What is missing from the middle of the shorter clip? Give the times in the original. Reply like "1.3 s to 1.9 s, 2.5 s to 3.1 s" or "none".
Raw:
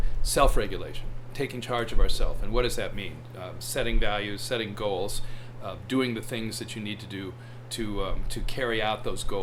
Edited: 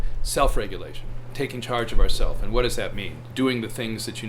3.2 s to 5.7 s

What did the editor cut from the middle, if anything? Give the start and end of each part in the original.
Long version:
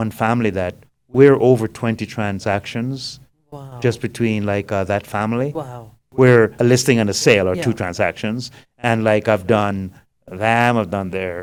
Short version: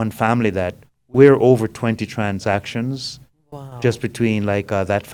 none

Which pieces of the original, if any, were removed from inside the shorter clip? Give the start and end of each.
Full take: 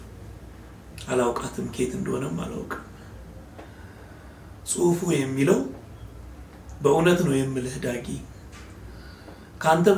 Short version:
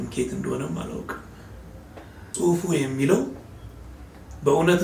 3.8 s to 4.6 s

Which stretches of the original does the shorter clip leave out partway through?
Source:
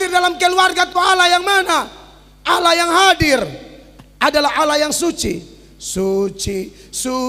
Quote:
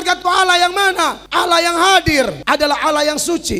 1.9 s to 2.3 s, 3.5 s to 4.1 s

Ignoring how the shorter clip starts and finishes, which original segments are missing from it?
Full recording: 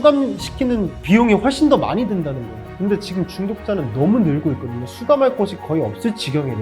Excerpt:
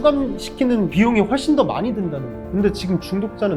0.9 s to 1.0 s, 2.5 s to 2.6 s

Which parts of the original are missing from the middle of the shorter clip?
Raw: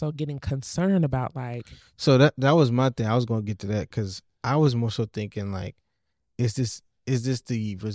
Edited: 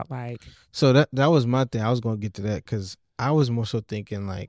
none

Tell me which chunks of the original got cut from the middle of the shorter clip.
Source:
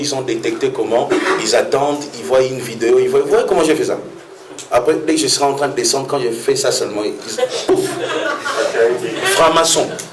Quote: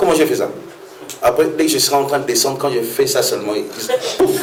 none

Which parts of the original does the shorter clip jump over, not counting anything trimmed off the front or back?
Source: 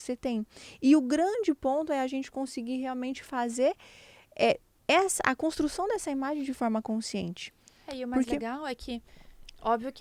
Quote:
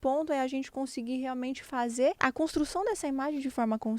3.8 s to 5.2 s

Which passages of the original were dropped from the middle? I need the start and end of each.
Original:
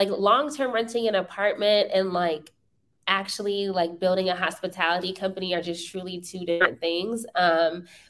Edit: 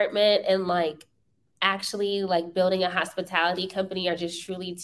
none

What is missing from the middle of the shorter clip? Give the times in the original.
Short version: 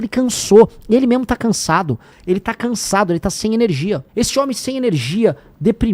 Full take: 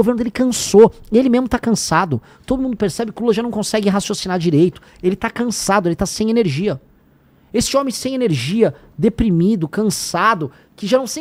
2.3 s to 4.9 s, 6.8 s to 7.4 s

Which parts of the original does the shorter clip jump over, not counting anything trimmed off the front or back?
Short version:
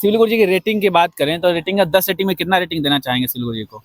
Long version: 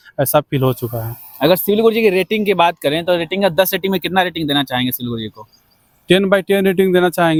none

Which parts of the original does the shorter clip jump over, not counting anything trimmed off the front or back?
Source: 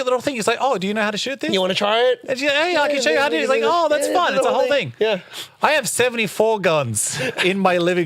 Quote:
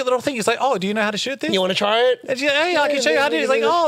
none

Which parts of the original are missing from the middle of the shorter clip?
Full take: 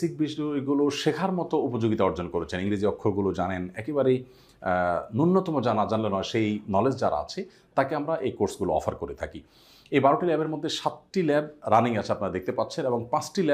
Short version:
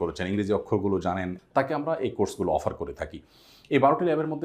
3.7 s to 7.6 s

